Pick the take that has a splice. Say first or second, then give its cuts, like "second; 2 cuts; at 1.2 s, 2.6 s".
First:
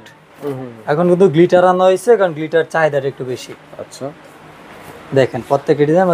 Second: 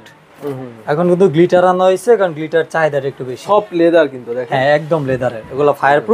second; 1 cut; at 3.4 s